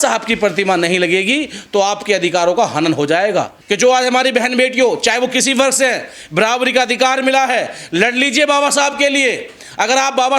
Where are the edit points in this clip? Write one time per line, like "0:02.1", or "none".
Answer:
0:03.6